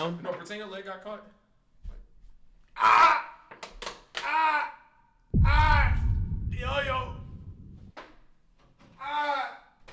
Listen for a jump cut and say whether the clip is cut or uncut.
uncut